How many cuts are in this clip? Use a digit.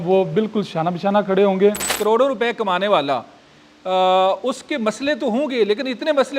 1